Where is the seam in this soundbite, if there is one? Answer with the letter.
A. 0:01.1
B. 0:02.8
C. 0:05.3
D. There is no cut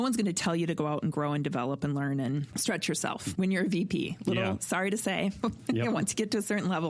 B